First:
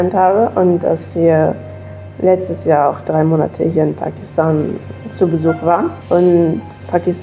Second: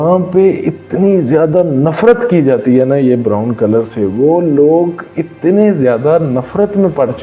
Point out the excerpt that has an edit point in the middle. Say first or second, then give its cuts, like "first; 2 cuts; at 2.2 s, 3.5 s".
first; 1 cut; at 6.0 s